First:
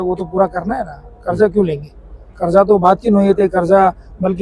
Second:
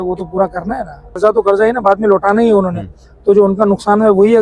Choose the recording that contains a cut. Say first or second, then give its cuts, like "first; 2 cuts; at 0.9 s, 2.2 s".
second; 1 cut; at 1.2 s